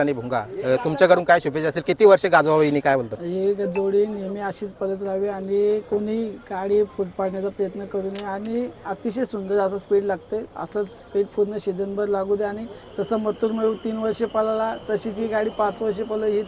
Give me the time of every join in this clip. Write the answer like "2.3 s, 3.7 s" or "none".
none